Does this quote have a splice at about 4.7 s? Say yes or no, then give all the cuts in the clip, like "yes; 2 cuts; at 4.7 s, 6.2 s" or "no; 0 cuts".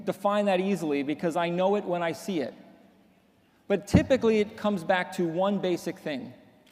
yes; 1 cut; at 4.7 s